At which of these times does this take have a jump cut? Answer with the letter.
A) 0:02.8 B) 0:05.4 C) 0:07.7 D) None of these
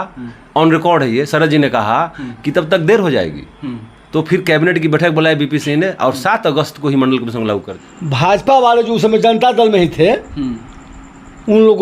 C